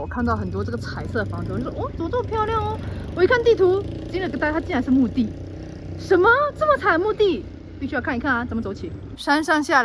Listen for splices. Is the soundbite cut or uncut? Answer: uncut